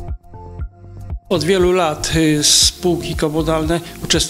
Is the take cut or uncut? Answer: cut